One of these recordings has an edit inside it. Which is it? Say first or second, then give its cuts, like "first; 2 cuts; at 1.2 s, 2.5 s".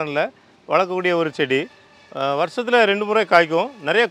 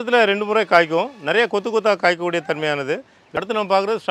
second; 1 cut; at 3.2 s